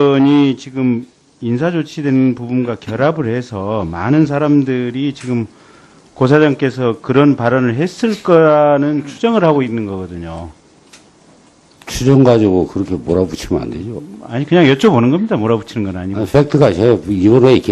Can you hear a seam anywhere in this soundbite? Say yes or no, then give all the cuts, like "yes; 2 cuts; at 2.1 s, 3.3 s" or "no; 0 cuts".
yes; 1 cut; at 5.4 s